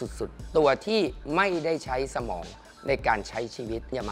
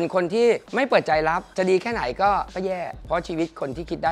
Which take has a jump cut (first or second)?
second